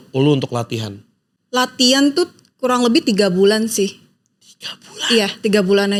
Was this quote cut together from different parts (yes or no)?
no